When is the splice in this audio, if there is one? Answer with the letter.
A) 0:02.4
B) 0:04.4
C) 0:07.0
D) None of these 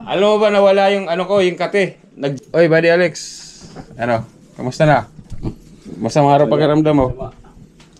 A